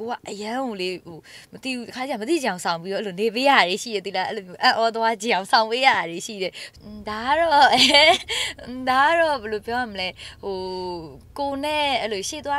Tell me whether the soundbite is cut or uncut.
cut